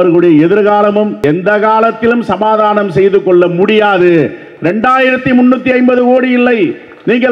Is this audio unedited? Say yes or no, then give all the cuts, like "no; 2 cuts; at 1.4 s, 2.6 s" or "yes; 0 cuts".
no; 1 cut; at 1.2 s